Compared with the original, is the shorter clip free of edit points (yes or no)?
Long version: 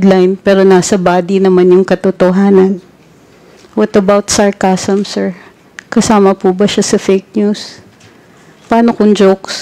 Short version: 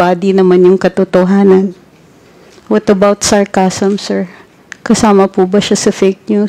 yes